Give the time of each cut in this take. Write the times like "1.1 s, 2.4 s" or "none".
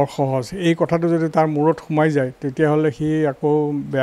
none